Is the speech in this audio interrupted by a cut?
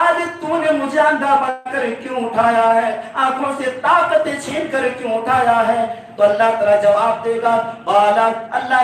no; 0 cuts

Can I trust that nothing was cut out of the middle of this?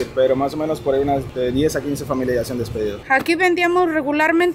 no; 2 cuts; at 1.3 s, 3.0 s

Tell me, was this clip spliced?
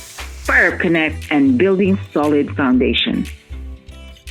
yes; 1 cut; at 3.3 s

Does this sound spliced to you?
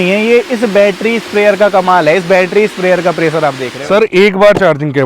yes; 1 cut; at 3.7 s

